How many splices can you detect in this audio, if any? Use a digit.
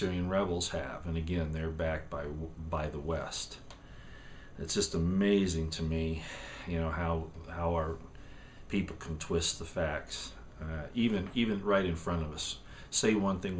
1